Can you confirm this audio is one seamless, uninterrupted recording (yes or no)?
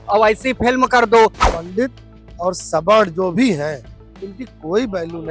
no